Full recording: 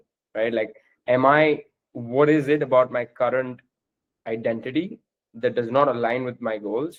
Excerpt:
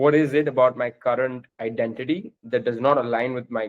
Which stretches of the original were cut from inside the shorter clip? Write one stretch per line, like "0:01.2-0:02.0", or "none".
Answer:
0:03.6-0:04.1
0:05.0-0:05.2